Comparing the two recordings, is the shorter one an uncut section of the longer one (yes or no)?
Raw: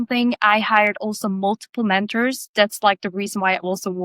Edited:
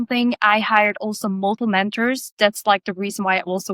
no